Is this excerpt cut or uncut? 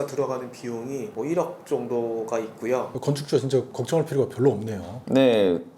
cut